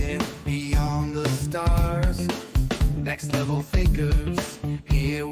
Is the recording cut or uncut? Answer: uncut